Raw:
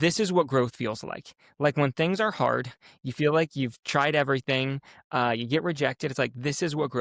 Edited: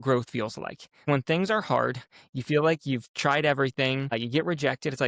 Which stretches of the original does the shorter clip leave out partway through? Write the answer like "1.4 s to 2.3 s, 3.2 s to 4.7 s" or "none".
1.5 s to 1.7 s, 4.8 s to 5.3 s